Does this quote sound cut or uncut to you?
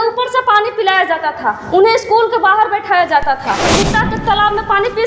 cut